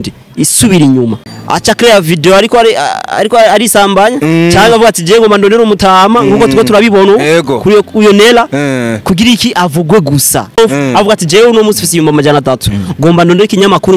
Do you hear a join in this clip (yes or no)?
yes